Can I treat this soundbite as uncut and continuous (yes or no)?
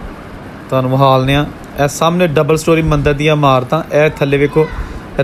yes